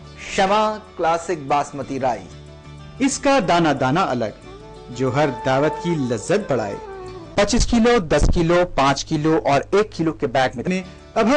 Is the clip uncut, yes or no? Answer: yes